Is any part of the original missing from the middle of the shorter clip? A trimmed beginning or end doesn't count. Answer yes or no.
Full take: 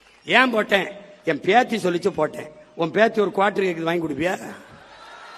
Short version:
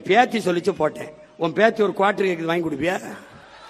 no